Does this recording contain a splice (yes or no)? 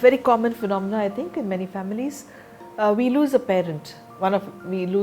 no